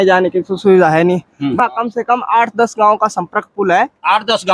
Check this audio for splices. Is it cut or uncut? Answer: cut